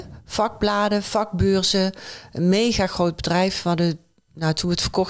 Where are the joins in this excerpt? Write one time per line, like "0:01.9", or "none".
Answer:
none